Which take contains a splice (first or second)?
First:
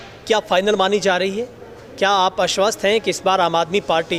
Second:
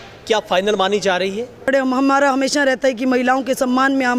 second